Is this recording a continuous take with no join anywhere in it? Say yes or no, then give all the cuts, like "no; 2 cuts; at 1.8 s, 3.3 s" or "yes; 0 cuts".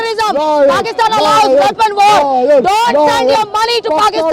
yes; 0 cuts